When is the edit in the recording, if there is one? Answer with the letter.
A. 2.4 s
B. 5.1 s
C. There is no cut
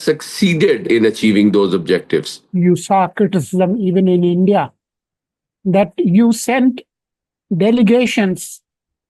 A